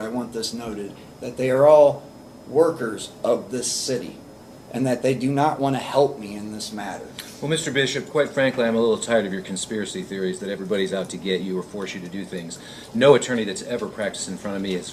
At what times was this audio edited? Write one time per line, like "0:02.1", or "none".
none